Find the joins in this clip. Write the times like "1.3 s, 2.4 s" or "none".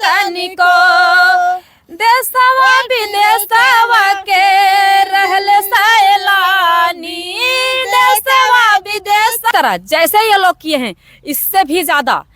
9.5 s